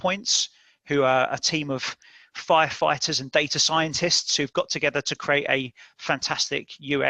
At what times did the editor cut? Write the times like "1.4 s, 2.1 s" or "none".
none